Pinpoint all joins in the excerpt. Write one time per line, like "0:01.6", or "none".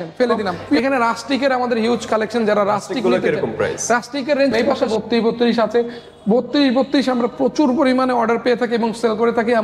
0:00.8
0:04.7

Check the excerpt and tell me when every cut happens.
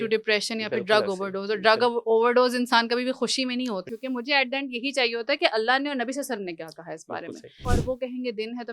0:03.8
0:07.7

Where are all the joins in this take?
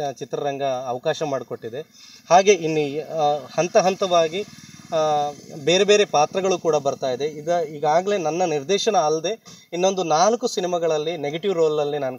none

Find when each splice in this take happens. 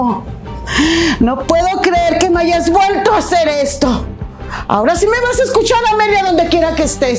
none

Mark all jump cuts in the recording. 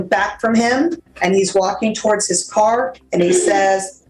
0:01.1

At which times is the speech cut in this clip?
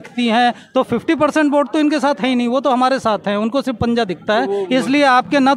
none

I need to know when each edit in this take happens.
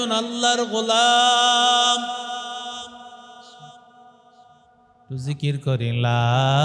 none

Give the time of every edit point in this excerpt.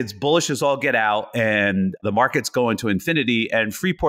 0:02.0

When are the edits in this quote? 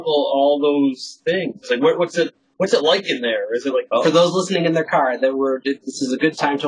0:03.9

